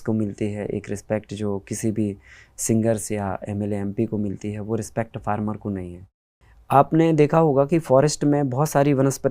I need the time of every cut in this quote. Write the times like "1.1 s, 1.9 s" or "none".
6.0 s